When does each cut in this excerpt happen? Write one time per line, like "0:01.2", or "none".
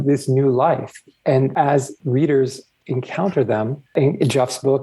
0:01.6

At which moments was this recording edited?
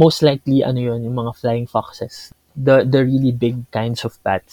0:02.3
0:03.7

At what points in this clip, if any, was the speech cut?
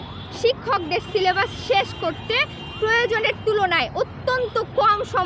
none

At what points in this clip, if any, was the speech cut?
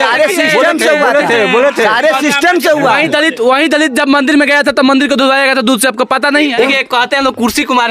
0:06.5

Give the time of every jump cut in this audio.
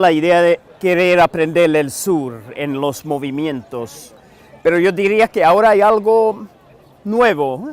0:03.7

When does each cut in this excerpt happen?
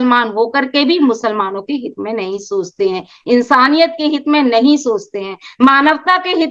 none

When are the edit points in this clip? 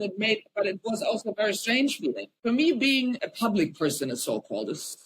0:02.3
0:03.2

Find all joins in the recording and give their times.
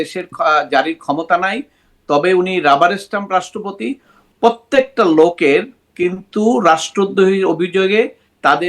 0:04.2

